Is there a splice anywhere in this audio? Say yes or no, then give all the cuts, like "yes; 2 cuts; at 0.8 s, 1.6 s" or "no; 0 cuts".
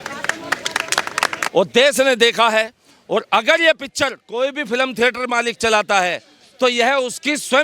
yes; 1 cut; at 1.4 s